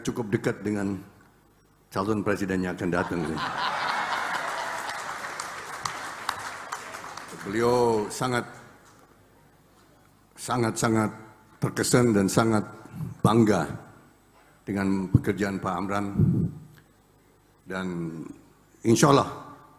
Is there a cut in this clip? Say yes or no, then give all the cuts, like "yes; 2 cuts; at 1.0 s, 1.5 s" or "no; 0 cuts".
no; 0 cuts